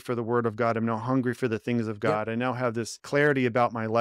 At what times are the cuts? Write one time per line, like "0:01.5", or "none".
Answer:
0:02.9